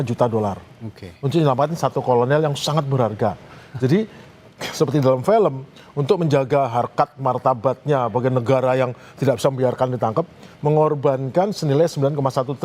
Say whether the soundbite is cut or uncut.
uncut